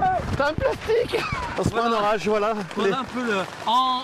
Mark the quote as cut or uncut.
uncut